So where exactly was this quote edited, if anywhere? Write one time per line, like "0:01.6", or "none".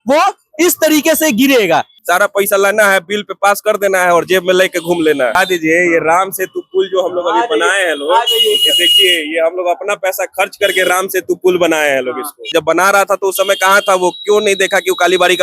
0:02.0
0:05.4
0:12.6